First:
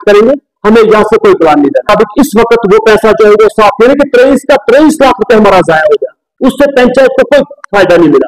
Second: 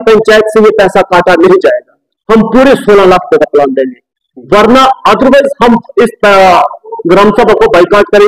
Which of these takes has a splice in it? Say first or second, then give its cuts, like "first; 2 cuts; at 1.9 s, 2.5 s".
first; 1 cut; at 1.9 s